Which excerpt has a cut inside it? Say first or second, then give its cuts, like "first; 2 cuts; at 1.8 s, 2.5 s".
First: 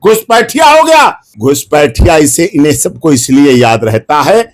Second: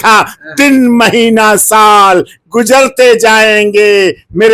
first; 1 cut; at 1.3 s